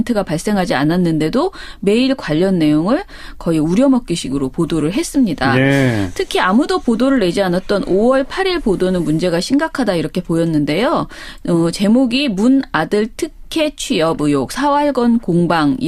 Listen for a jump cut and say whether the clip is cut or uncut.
uncut